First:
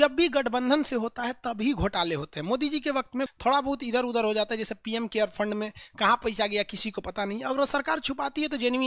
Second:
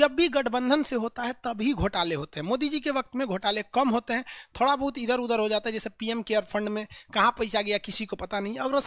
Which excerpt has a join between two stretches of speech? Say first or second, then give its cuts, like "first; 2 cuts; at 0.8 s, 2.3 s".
first; 1 cut; at 3.3 s